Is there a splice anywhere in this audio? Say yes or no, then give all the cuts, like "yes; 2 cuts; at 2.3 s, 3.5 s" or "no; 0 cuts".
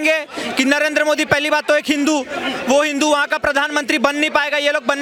no; 0 cuts